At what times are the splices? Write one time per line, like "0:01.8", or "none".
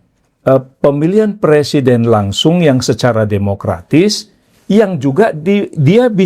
none